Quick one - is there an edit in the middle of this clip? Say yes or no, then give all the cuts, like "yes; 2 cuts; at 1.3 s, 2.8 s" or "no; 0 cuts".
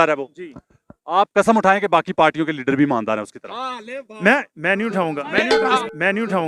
no; 0 cuts